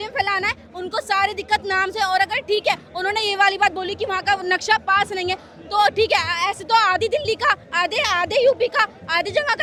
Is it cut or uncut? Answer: uncut